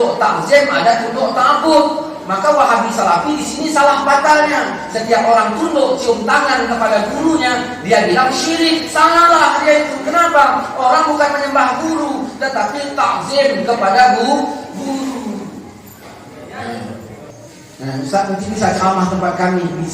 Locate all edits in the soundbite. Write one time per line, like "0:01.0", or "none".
0:17.3